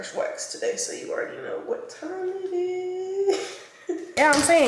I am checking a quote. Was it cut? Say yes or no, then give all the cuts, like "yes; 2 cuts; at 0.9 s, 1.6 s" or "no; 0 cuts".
yes; 1 cut; at 3.7 s